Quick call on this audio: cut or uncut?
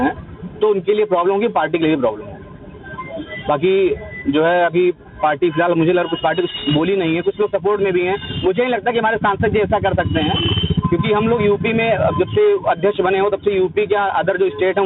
uncut